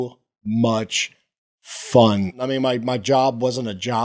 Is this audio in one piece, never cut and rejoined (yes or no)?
no